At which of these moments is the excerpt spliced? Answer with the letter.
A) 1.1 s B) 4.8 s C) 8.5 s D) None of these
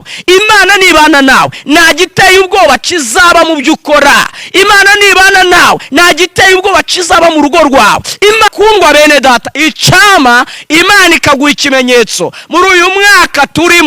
C